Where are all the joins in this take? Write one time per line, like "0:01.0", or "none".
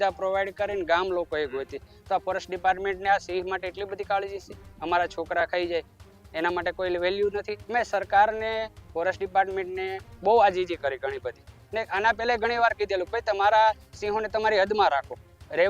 0:07.6